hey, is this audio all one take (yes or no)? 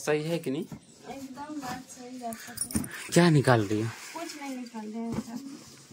yes